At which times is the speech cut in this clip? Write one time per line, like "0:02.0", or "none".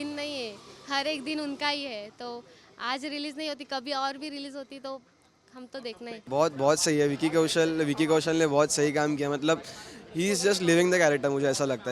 none